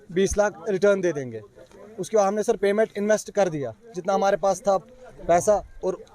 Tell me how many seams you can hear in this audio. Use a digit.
0